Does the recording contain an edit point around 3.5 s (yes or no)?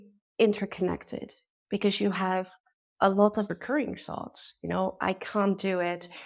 yes